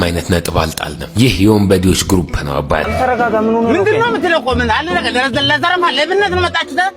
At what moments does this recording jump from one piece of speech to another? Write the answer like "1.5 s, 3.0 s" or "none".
2.9 s